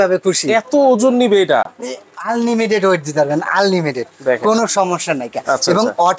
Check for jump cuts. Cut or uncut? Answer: uncut